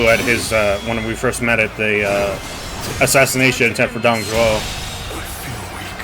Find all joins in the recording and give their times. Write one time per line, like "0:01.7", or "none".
none